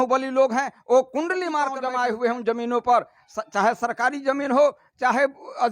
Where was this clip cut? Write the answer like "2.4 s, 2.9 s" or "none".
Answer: 1.8 s

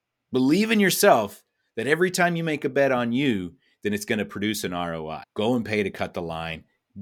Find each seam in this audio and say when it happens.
5.2 s

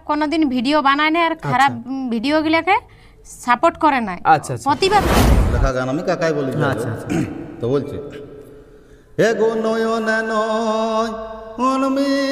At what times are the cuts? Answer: 5.5 s

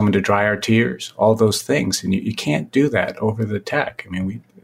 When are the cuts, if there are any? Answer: none

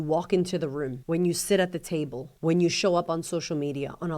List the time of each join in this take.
1.0 s, 2.2 s

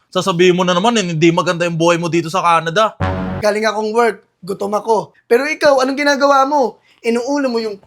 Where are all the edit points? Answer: 3.3 s, 5.1 s

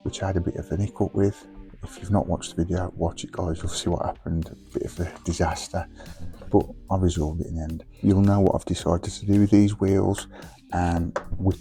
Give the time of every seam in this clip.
7.9 s

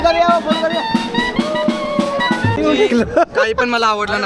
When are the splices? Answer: 2.6 s

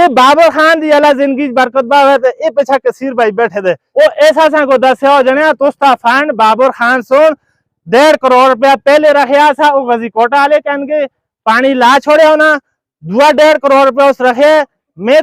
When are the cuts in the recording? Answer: 3.8 s

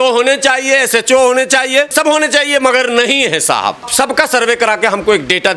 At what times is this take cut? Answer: 3.9 s

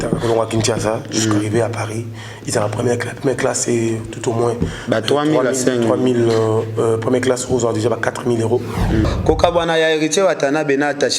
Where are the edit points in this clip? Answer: 9.0 s

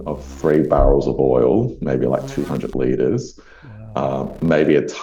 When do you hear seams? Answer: none

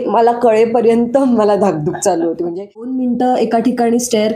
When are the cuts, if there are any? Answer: 3.0 s

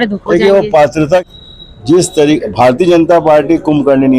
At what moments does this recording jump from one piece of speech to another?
1.2 s

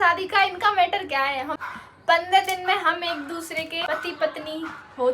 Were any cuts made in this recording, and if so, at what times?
1.6 s, 3.8 s

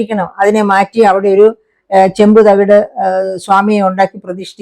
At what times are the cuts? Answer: none

